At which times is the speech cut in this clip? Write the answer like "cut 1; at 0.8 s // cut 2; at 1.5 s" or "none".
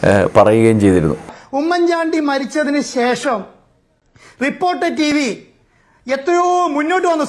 cut 1; at 1.4 s